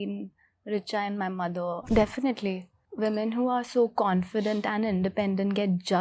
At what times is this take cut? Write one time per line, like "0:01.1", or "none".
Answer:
0:01.8